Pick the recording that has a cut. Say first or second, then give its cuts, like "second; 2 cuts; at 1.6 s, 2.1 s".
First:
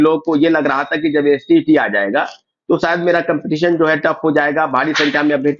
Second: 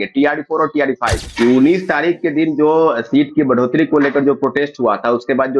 second; 1 cut; at 1.2 s